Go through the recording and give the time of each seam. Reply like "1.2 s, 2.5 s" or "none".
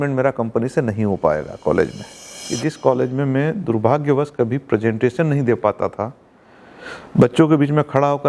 2.4 s